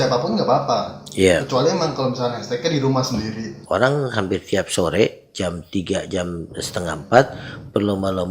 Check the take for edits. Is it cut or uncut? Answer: cut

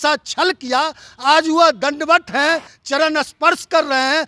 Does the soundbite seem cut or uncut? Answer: uncut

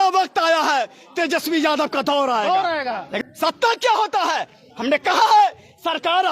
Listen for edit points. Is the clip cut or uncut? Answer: cut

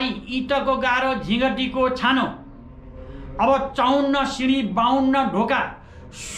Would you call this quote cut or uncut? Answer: uncut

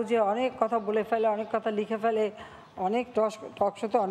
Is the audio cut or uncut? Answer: uncut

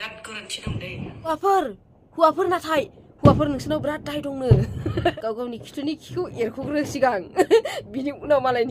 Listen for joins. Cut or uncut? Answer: cut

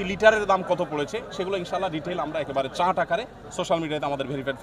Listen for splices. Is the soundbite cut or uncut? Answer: uncut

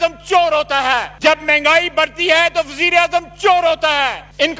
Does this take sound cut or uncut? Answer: uncut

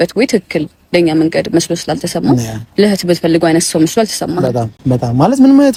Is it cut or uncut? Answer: uncut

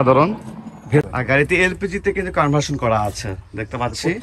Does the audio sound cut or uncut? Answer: cut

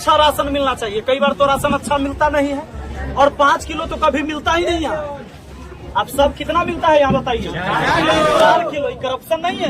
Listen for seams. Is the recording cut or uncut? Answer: uncut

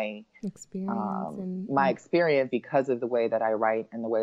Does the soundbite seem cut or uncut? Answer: cut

